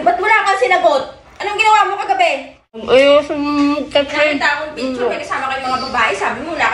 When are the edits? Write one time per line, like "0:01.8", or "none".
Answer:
0:02.8